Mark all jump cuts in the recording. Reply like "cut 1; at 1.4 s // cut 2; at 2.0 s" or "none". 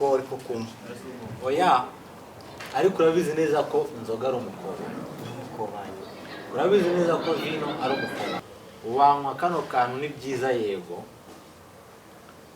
cut 1; at 8.4 s